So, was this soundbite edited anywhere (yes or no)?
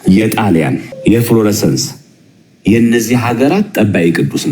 yes